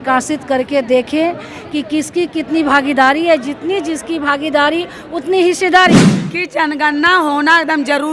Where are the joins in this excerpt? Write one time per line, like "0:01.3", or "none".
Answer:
0:06.2